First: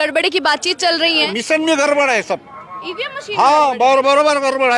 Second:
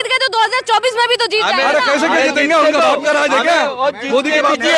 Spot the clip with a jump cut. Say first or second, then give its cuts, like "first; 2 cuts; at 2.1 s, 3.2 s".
first; 1 cut; at 1.3 s